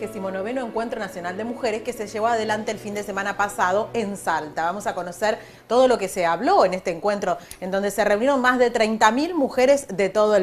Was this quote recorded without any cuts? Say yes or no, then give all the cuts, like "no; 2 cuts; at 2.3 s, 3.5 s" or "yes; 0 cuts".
yes; 0 cuts